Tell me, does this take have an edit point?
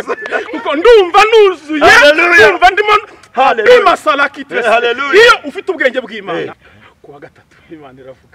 yes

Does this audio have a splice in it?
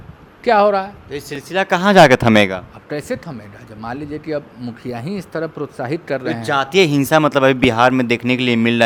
no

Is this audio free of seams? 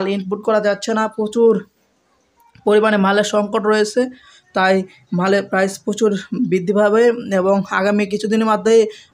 yes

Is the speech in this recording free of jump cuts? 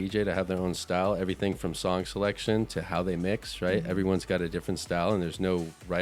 yes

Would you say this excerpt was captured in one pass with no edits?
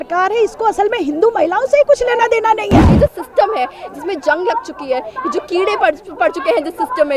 no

